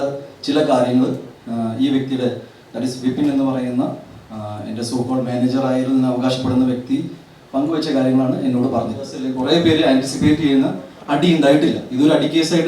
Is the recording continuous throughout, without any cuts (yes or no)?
no